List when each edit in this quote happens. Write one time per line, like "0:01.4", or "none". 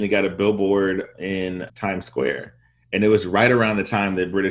0:01.7